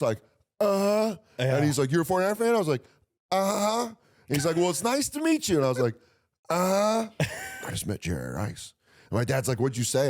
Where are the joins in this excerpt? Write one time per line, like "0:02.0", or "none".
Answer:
0:07.4